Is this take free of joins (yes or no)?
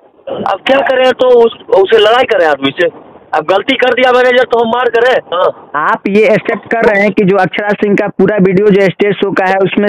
no